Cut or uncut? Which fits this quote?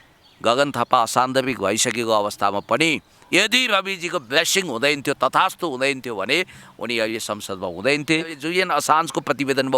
cut